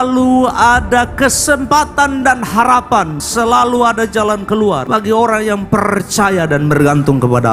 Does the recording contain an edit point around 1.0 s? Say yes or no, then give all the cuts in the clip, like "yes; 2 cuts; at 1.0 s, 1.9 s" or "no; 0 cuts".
no; 2 cuts; at 3.2 s, 4.9 s